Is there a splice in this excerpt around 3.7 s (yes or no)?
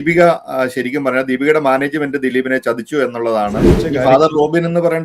yes